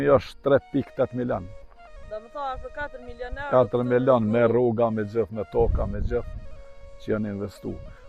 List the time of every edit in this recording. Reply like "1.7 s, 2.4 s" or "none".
none